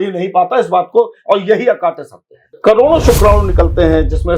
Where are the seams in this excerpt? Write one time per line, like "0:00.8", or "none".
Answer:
0:02.6

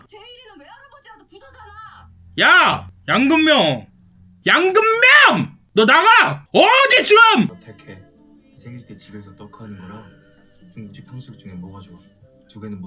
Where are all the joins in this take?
0:07.6

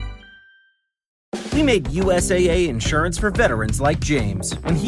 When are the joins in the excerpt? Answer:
0:01.2

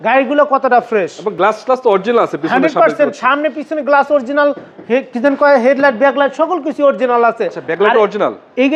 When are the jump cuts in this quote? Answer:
none

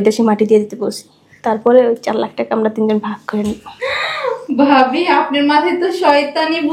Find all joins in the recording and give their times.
none

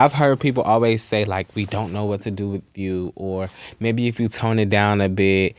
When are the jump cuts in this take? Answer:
none

